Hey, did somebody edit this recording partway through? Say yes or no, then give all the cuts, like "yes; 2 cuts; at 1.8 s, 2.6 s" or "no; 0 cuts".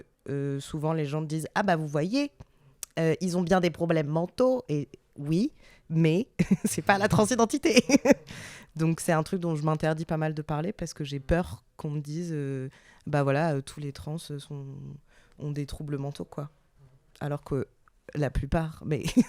no; 0 cuts